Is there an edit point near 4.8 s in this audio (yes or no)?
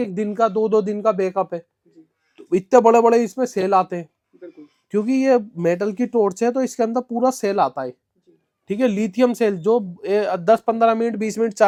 no